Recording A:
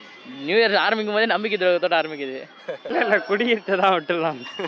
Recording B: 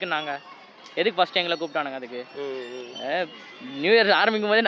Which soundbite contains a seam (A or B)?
A